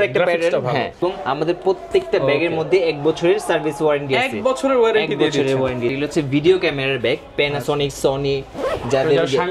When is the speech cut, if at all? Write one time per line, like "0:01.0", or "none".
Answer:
0:01.0
0:05.9